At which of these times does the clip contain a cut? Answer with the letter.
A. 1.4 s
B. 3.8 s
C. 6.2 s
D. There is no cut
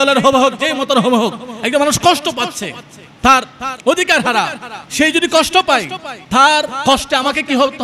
D